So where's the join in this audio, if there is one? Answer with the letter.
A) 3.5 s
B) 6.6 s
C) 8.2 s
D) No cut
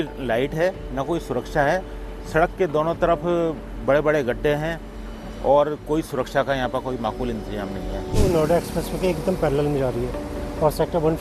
C